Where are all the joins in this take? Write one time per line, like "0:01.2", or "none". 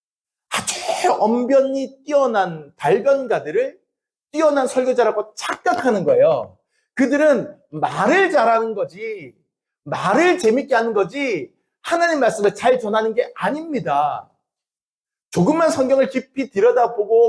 none